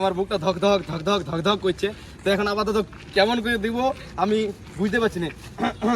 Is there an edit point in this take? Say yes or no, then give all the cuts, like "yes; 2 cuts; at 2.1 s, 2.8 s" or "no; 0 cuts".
no; 0 cuts